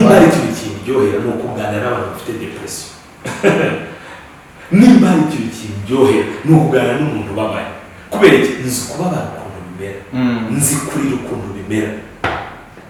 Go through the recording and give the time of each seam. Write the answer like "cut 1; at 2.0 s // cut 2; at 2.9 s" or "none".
none